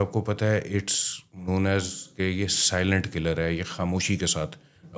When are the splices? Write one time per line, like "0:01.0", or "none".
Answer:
none